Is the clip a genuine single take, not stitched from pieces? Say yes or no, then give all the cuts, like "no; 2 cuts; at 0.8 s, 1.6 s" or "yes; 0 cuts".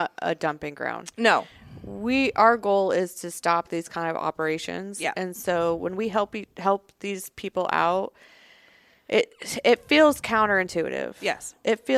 yes; 0 cuts